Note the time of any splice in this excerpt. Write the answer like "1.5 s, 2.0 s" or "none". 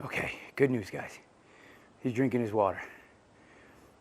none